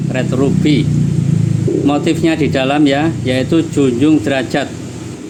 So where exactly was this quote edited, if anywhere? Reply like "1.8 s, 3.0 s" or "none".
none

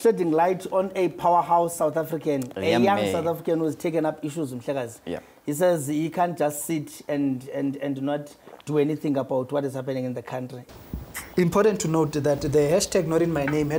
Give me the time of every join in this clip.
10.6 s

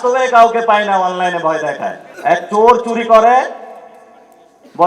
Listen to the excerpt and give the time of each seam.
2.0 s

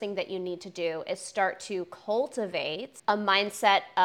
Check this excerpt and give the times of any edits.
2.9 s

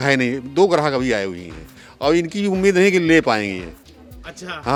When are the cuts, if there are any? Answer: none

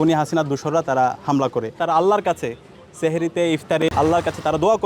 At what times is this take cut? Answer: 1.7 s

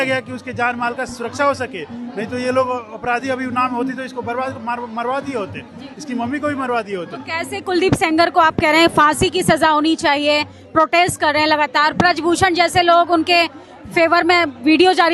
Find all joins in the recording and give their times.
none

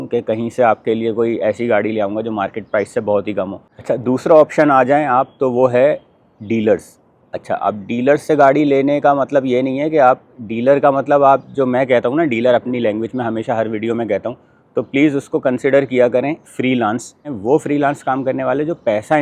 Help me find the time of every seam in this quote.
3.7 s, 17.3 s

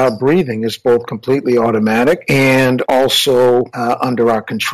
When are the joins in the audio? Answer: 2.5 s, 3.7 s

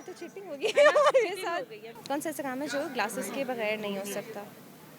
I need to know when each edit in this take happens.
2.0 s

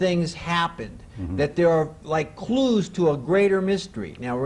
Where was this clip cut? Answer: 2.3 s

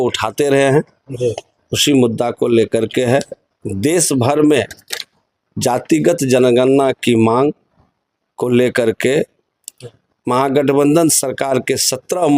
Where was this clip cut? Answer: none

